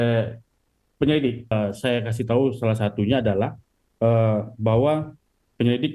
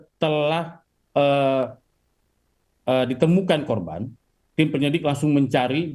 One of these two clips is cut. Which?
first; 1 cut; at 1.5 s

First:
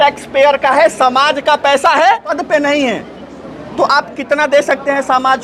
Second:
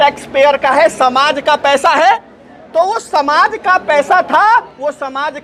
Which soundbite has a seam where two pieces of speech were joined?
first; 1 cut; at 2.3 s

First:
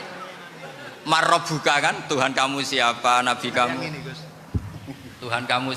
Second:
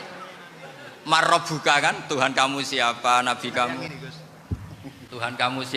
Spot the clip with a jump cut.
second; 1 cut; at 4.5 s

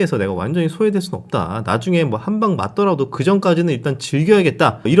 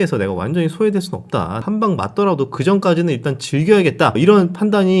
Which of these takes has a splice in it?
second; 2 cuts; at 1.6 s, 4.1 s

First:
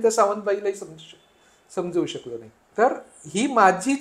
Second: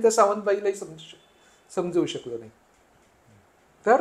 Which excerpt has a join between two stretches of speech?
first; 1 cut; at 2.6 s

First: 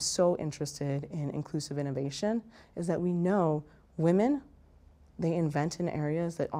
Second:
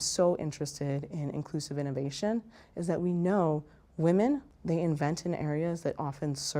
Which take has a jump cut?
second; 1 cut; at 4.5 s

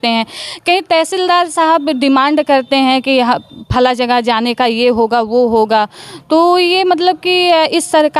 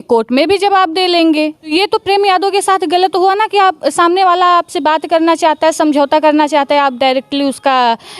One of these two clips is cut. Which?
second; 1 cut; at 1.7 s

